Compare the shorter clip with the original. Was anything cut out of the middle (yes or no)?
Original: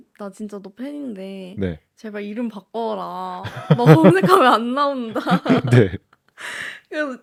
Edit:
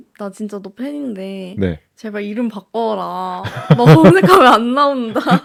no